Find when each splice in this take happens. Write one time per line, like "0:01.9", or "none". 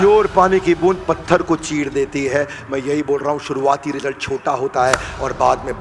none